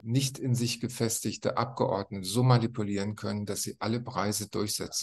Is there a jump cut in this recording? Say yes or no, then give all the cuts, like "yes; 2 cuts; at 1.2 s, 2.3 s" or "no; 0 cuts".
no; 0 cuts